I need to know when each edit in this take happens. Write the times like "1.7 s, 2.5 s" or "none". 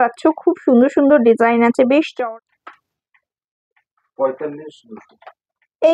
2.1 s

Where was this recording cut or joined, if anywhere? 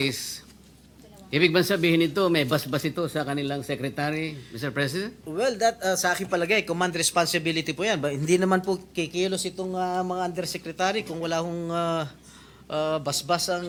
none

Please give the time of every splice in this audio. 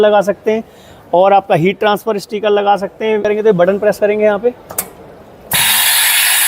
3.2 s

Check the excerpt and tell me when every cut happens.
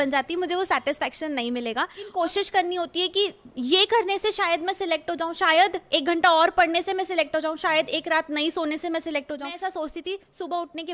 2.1 s, 9.5 s

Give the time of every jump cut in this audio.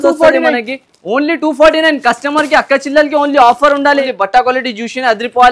4.0 s

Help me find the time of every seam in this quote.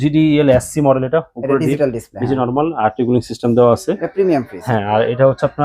none

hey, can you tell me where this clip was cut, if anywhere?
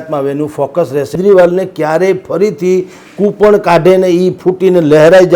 1.1 s

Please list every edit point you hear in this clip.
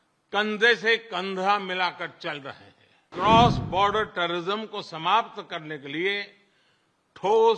3.1 s

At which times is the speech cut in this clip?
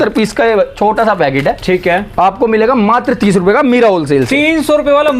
none

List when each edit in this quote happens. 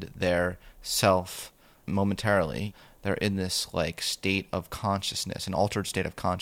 1.9 s, 2.7 s

